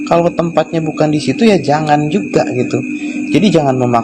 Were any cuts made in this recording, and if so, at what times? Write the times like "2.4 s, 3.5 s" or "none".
none